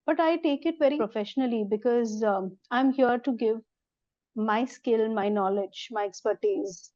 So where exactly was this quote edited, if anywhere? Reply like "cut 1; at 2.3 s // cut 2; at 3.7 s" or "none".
cut 1; at 1.0 s